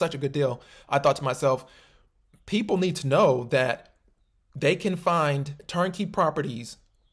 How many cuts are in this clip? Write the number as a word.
zero